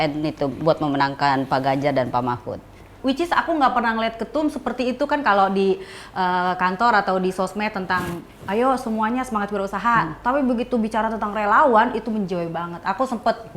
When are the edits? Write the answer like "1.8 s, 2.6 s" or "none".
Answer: 2.9 s